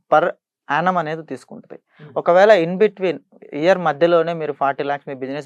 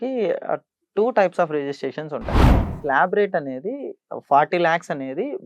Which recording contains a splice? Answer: second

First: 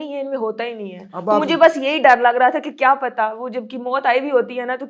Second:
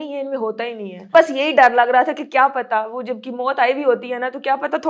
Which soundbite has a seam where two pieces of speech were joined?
second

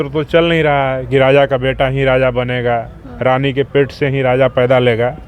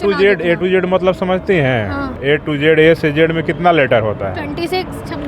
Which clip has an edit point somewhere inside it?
second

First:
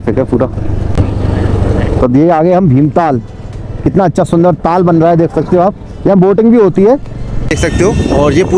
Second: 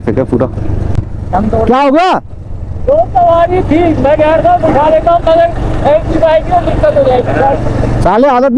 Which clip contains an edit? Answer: first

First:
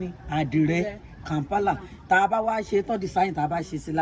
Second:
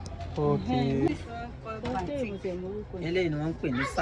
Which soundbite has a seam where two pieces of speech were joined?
second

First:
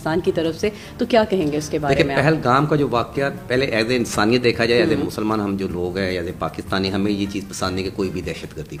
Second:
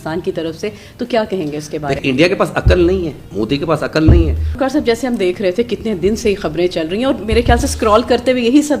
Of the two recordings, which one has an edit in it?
second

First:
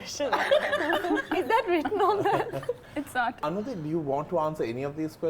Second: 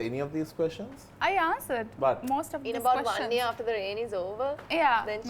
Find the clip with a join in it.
first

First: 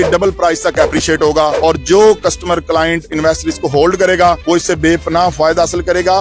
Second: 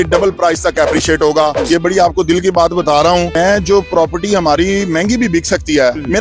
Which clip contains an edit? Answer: second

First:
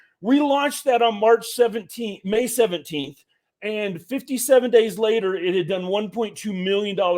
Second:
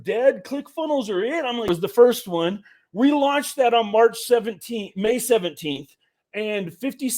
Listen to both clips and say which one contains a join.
second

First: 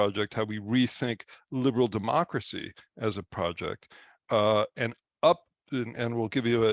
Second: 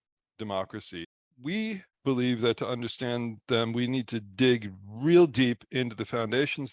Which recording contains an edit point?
second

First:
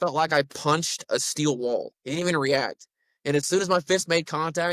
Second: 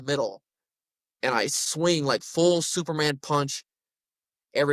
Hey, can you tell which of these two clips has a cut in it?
first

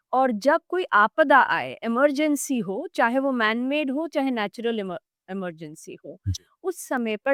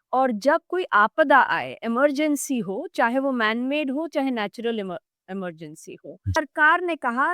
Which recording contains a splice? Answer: second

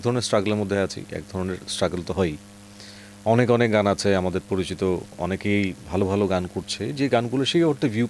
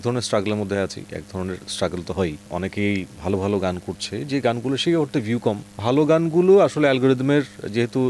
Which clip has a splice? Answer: second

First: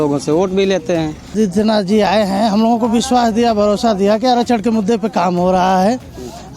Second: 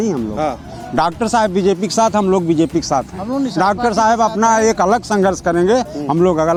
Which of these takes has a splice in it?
first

